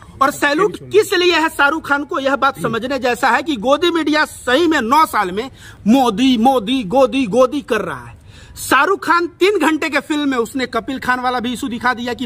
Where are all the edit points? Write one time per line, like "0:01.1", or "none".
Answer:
none